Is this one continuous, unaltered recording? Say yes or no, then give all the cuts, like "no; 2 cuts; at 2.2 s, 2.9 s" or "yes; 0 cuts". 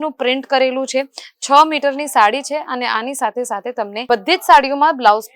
no; 1 cut; at 4.1 s